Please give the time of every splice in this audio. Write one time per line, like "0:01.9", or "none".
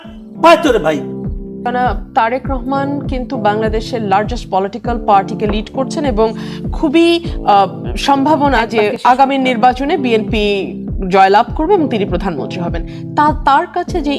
0:01.6